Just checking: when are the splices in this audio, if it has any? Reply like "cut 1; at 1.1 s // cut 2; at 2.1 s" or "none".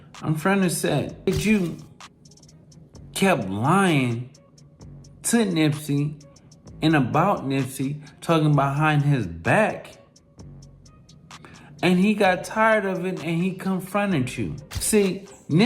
cut 1; at 14.6 s